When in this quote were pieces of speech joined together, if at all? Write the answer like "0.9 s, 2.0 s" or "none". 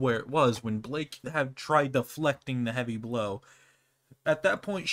1.2 s